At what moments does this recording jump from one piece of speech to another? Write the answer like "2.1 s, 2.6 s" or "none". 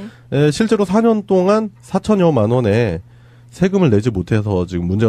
none